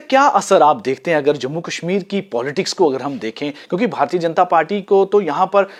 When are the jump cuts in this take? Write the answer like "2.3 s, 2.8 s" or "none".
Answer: none